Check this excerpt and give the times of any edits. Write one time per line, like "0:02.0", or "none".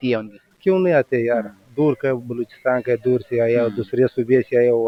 none